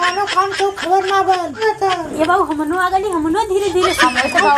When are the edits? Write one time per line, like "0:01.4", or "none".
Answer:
0:01.6